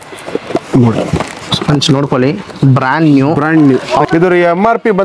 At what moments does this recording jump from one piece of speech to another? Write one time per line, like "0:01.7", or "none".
0:04.1